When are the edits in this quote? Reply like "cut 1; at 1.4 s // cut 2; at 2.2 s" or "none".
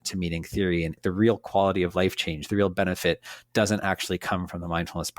cut 1; at 0.9 s